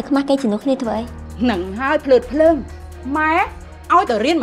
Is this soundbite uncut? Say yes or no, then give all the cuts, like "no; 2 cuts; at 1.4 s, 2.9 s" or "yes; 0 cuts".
no; 1 cut; at 1.2 s